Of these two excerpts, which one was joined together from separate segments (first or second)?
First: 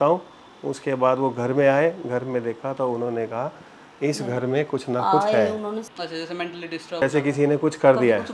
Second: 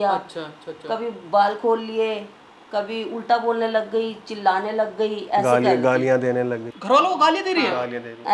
first